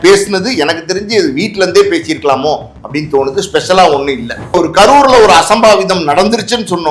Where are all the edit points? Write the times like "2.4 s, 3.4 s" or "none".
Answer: 4.5 s